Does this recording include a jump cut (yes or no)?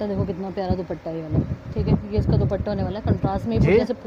no